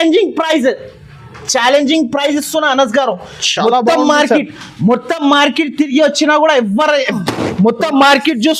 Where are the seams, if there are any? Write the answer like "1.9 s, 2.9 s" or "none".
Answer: 7.2 s